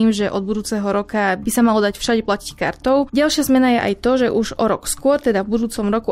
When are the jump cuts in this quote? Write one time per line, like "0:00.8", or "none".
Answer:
0:01.4
0:03.1